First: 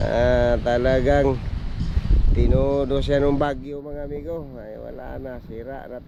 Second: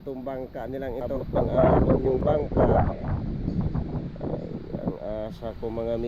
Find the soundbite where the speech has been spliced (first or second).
second